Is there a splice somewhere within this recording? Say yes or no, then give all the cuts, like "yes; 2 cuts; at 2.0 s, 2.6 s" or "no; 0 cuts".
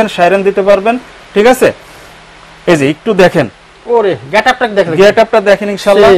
no; 0 cuts